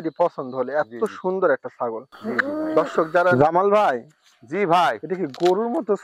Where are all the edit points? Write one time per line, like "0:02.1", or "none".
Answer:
0:03.3